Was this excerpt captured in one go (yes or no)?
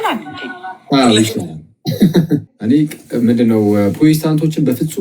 no